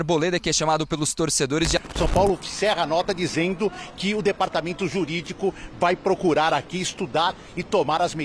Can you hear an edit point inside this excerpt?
yes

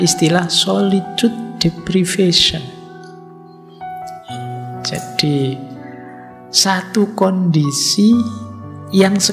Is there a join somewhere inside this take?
yes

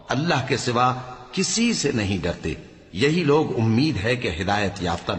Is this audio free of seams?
yes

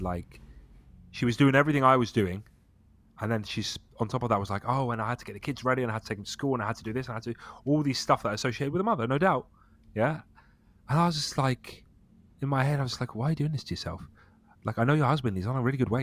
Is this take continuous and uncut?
yes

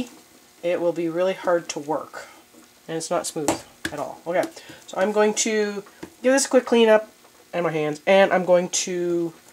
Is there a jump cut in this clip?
no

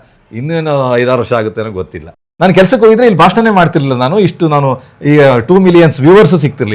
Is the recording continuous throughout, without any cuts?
no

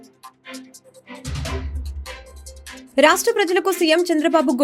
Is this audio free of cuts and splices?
no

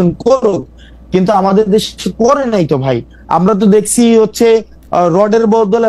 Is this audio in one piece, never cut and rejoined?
yes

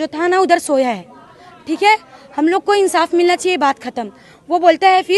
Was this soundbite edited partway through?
no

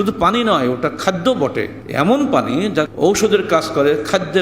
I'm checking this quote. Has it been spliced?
yes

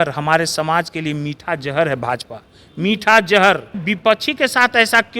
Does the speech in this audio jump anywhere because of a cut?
yes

